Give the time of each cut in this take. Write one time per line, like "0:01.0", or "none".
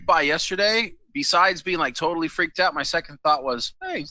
none